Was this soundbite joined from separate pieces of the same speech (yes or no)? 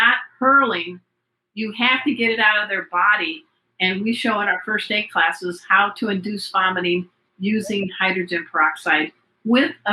no